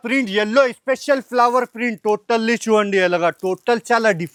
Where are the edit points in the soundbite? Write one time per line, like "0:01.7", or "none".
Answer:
none